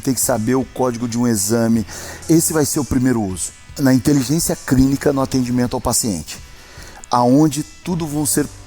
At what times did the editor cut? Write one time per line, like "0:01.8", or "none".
0:02.2
0:03.7